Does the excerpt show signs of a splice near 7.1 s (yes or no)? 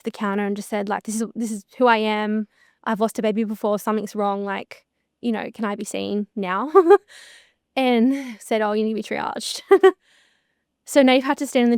no